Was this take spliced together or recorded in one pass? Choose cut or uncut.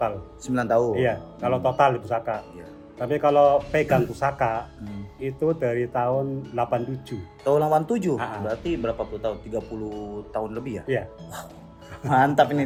uncut